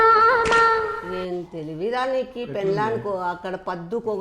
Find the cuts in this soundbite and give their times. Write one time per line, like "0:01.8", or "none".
0:01.0